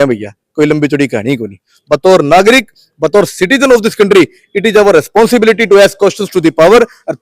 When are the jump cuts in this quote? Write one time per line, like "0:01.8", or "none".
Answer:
0:01.8